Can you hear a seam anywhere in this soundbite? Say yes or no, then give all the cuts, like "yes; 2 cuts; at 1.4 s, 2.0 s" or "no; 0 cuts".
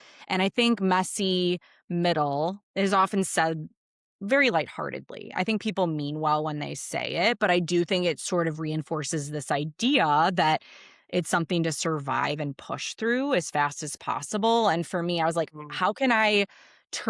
no; 0 cuts